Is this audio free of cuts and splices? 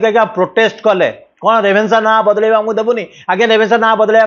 yes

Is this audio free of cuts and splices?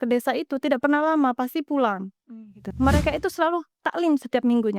no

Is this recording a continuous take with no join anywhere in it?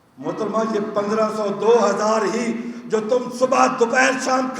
yes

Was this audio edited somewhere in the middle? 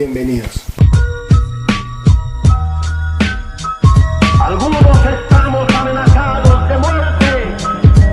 yes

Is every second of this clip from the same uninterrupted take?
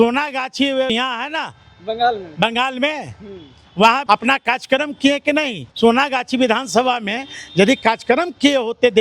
no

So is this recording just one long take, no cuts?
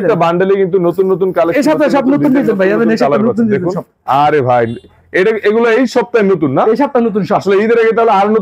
yes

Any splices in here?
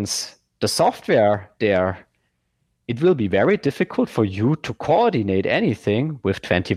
no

